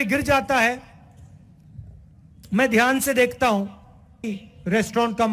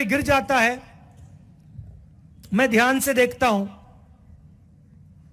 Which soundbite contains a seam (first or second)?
first